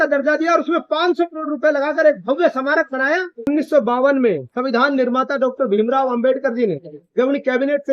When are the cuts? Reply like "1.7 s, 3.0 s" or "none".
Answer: 3.5 s